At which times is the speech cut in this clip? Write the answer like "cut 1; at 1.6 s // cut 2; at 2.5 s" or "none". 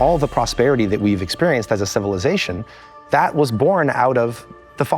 cut 1; at 2.9 s